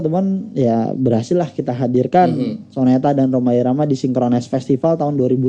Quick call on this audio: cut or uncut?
uncut